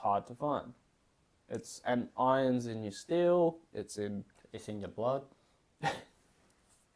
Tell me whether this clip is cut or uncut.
uncut